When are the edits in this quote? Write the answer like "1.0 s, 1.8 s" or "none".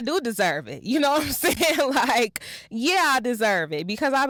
none